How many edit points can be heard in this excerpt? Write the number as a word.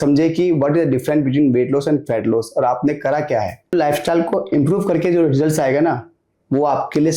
one